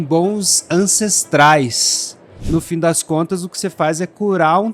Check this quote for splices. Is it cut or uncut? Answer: cut